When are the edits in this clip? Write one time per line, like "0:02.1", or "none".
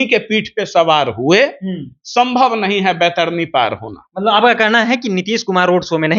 none